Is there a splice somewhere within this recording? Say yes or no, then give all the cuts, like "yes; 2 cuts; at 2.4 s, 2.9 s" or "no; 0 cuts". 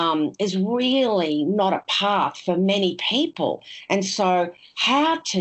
no; 0 cuts